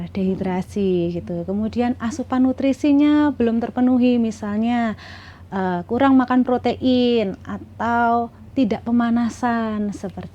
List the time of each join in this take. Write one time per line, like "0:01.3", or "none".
none

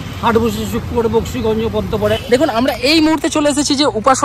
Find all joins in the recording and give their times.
0:02.2

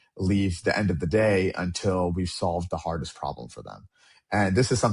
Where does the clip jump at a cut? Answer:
none

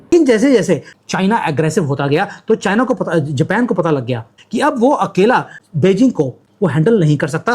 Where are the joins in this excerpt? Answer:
0:00.9

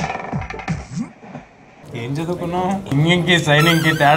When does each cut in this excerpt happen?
0:01.8
0:02.9

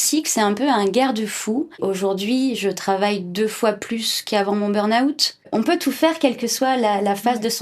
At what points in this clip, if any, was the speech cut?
0:01.8
0:05.4

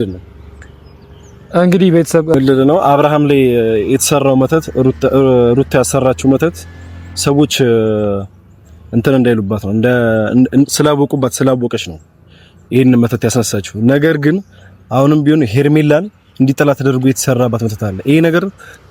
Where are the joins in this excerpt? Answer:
0:02.3

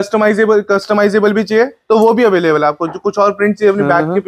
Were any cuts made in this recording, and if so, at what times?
none

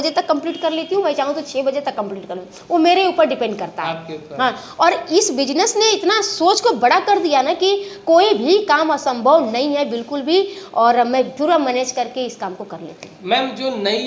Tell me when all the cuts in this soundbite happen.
none

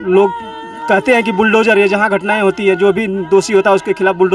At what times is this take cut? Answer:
none

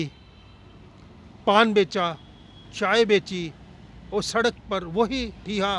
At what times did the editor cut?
none

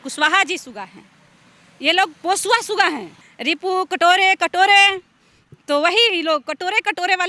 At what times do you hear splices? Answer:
0:03.3

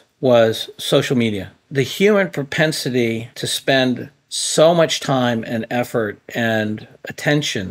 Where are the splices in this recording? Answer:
0:01.5

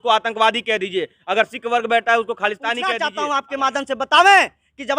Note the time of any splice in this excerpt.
0:02.9

